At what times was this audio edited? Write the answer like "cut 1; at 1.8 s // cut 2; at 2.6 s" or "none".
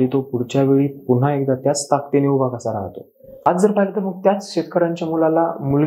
cut 1; at 3.5 s